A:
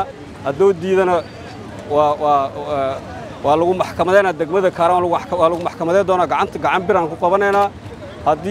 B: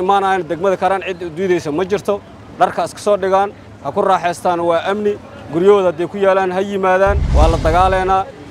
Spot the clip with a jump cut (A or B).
B